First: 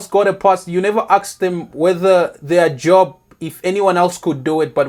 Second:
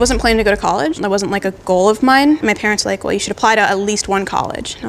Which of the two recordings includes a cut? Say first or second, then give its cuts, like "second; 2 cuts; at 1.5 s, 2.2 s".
second; 1 cut; at 1.0 s